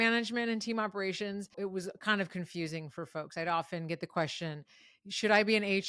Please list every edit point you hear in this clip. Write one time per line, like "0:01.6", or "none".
0:01.6